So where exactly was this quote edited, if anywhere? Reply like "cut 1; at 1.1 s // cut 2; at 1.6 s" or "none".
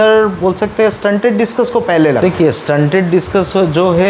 cut 1; at 2.2 s